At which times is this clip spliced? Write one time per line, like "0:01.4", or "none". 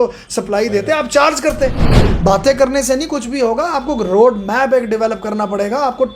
0:02.0